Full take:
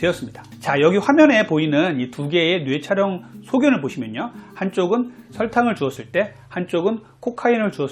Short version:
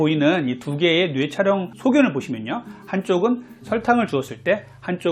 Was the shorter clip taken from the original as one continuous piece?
no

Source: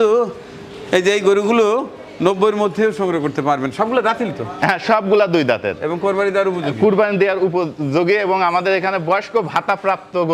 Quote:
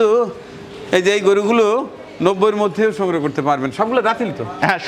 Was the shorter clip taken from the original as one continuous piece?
yes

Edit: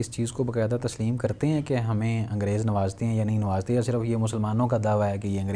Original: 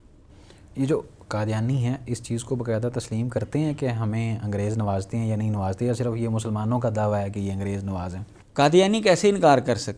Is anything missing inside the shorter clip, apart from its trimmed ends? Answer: no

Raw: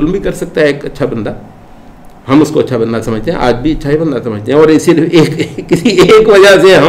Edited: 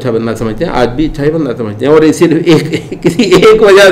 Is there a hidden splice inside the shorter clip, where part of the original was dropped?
no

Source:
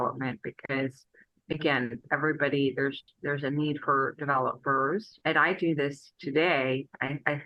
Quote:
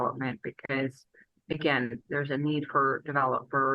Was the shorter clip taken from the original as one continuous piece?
no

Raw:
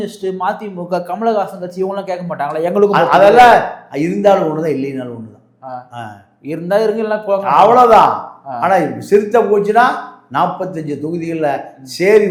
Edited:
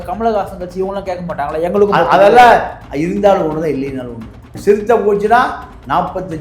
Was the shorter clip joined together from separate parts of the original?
yes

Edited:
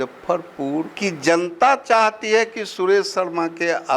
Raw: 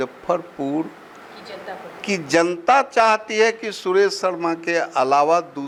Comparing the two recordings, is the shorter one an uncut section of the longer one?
no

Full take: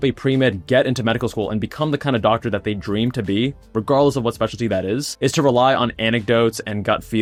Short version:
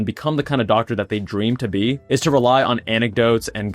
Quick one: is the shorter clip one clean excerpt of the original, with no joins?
no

